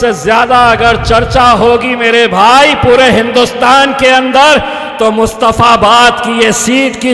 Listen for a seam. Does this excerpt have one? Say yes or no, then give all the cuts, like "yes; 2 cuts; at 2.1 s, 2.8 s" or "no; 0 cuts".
no; 0 cuts